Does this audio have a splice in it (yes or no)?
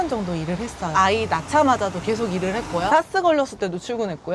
yes